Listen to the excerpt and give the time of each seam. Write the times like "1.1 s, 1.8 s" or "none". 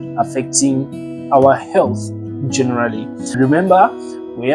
3.4 s